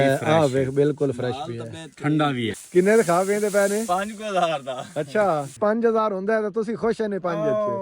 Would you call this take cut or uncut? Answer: cut